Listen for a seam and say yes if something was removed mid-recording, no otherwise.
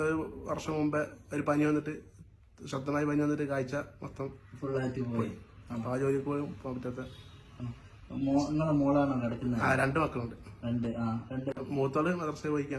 no